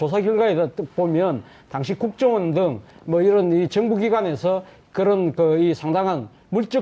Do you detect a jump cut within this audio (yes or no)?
yes